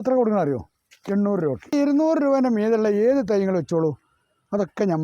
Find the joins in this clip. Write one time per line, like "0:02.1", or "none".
0:01.7